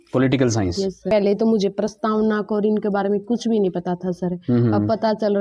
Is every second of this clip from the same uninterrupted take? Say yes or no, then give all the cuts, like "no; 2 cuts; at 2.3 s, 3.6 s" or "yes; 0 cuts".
no; 1 cut; at 1.1 s